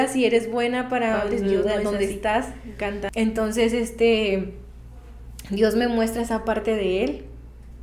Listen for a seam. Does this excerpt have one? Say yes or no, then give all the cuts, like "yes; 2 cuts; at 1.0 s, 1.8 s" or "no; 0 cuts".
yes; 1 cut; at 3.1 s